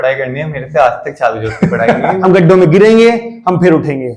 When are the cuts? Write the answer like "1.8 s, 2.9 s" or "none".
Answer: 2.2 s